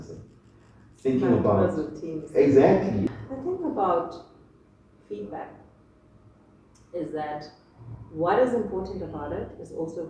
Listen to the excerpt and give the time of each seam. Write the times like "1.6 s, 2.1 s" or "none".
3.0 s